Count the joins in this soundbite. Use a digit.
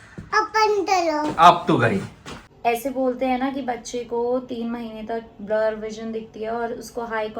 1